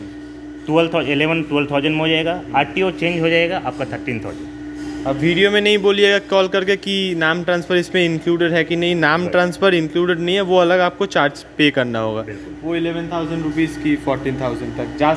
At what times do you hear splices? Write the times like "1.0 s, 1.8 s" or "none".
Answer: none